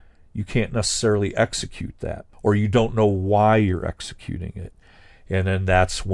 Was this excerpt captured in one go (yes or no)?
no